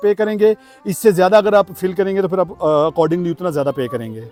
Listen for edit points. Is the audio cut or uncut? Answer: uncut